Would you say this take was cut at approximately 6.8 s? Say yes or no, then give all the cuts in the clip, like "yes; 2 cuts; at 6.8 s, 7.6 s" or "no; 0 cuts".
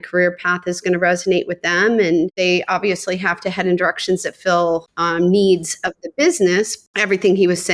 yes; 3 cuts; at 2.3 s, 5.0 s, 6.8 s